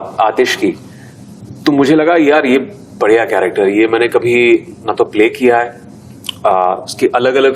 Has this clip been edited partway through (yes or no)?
no